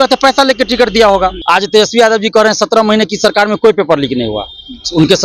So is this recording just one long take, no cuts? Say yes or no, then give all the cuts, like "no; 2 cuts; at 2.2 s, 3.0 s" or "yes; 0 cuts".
no; 1 cut; at 1.4 s